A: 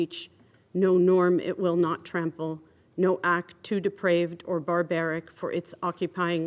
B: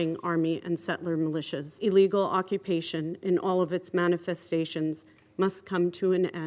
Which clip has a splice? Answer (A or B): B